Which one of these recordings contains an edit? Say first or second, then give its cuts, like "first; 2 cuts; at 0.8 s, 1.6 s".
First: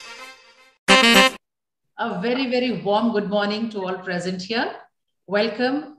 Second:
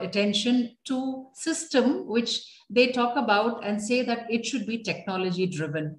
first; 1 cut; at 1.3 s